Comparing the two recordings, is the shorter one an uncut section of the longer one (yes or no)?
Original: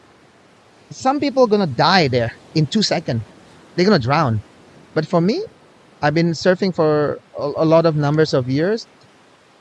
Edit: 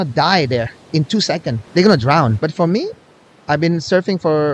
no